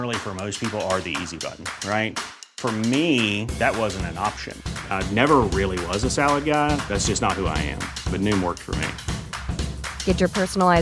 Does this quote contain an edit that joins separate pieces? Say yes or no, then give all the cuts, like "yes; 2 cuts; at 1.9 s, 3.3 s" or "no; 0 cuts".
no; 0 cuts